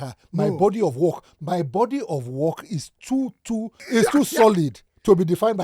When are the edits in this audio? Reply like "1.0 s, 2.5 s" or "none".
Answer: 3.7 s